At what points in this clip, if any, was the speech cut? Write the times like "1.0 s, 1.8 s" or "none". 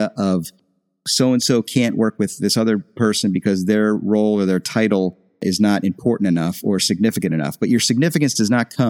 none